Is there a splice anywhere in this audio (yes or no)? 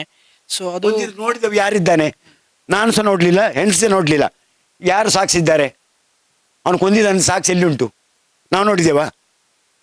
no